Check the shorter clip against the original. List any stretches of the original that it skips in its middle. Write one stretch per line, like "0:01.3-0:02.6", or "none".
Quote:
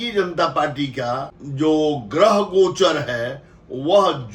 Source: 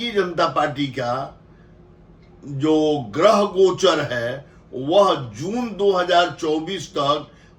0:01.4-0:02.4